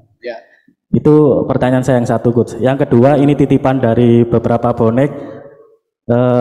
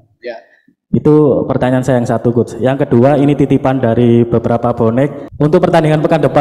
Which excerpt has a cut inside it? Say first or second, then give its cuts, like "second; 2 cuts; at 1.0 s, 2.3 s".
second; 1 cut; at 5.2 s